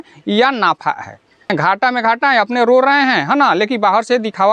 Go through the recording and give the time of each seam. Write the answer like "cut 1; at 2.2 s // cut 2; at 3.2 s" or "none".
cut 1; at 1.5 s